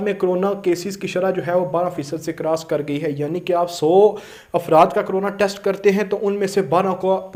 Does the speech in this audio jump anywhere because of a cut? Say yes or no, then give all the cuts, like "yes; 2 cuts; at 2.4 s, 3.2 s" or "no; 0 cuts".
no; 0 cuts